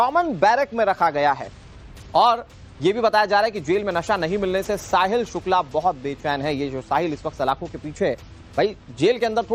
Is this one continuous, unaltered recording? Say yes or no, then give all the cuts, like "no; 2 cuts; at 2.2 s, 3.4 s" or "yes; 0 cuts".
yes; 0 cuts